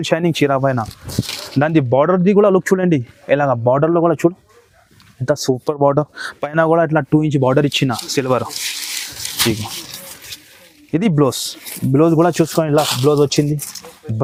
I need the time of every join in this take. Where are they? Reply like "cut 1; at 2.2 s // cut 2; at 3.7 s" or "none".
none